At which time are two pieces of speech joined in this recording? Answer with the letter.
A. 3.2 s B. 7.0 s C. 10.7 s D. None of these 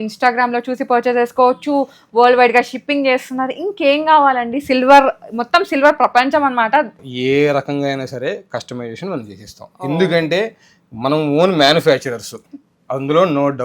B